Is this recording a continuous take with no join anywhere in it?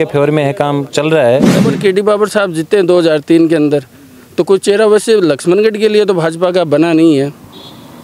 no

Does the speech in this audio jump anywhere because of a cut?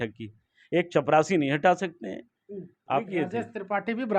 yes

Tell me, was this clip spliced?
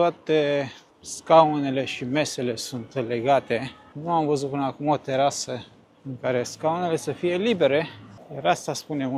no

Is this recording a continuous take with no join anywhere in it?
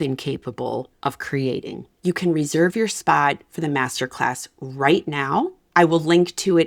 no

